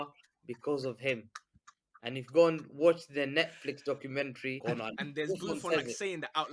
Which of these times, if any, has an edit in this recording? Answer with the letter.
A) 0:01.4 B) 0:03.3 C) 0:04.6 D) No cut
C